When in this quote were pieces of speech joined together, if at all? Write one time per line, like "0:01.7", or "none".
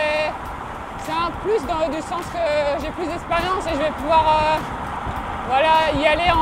none